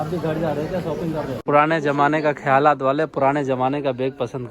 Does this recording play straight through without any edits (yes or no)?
no